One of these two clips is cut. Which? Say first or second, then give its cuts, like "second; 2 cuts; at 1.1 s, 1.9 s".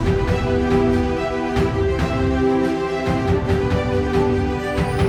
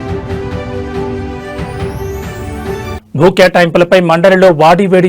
second; 1 cut; at 3.0 s